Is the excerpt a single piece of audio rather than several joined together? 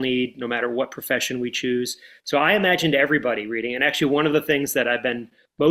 yes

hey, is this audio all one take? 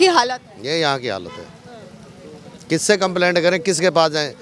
yes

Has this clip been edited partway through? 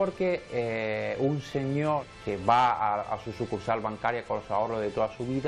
yes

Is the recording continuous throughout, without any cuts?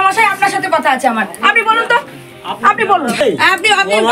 yes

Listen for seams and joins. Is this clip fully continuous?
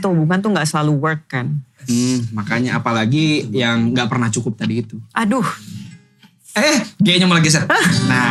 yes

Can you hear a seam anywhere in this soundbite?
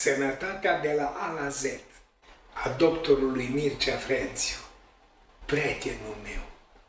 no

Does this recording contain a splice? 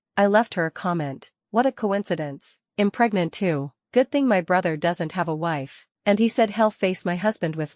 no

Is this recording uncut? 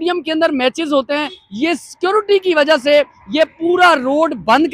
yes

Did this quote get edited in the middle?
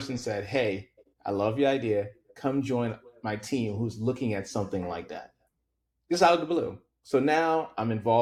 no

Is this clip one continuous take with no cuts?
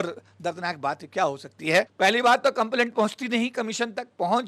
no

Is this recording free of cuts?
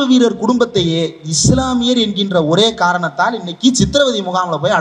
yes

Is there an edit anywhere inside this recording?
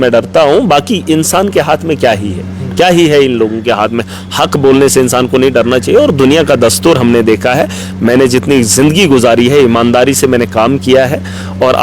no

